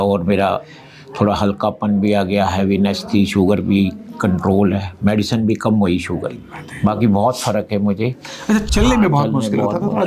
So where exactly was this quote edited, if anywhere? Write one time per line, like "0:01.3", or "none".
0:06.6
0:08.6